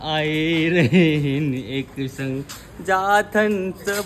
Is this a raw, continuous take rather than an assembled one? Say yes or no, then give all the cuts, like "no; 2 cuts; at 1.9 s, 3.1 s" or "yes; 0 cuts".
yes; 0 cuts